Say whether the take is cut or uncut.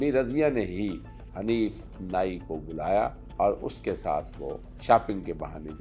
cut